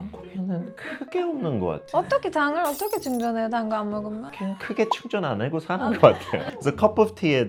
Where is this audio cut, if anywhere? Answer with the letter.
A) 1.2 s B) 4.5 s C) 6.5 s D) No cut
D